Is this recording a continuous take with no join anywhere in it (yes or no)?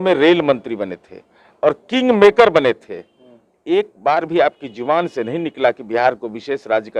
yes